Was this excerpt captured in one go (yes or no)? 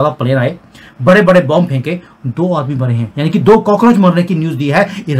yes